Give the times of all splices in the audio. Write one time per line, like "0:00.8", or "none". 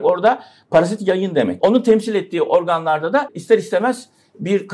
0:01.6
0:03.3